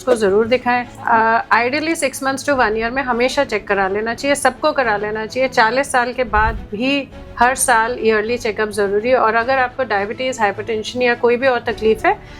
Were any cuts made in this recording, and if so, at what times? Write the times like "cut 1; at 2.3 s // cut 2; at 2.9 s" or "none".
cut 1; at 1.0 s

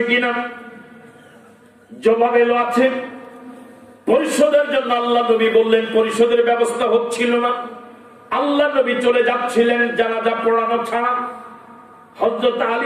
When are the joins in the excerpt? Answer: none

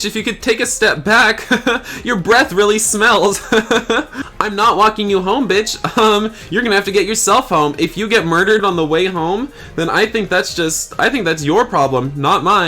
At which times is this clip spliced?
cut 1; at 4.2 s // cut 2; at 8.6 s

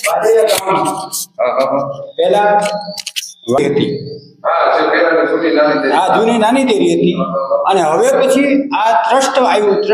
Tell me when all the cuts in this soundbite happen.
cut 1; at 3.6 s

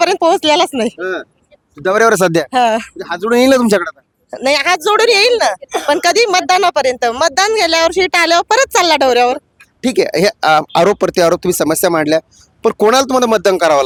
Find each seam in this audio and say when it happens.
none

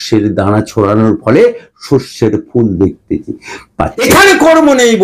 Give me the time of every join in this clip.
cut 1; at 4.0 s

